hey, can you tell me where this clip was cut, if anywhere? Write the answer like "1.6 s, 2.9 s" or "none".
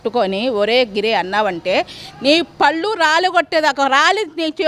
none

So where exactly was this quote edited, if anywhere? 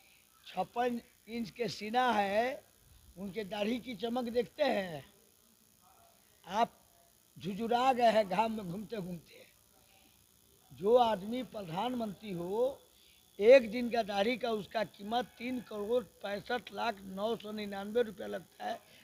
none

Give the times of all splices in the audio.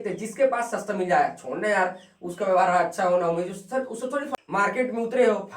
4.3 s

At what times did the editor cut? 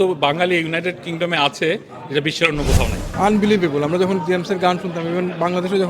3.1 s

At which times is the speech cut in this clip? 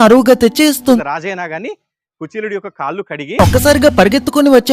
1.0 s

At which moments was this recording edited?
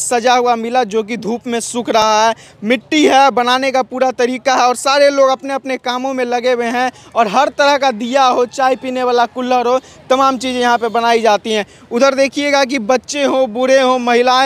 none

